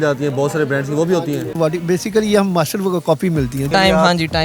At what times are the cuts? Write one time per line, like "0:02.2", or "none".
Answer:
0:01.3
0:03.7